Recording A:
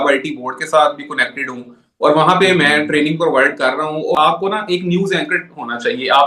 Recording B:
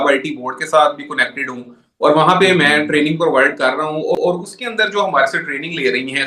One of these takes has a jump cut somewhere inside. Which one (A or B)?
A